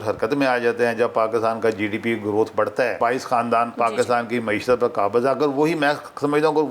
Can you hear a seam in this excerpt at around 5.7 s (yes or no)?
no